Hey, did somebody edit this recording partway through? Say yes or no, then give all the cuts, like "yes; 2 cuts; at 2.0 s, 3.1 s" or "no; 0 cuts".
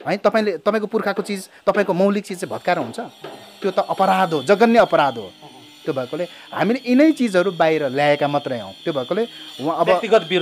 no; 0 cuts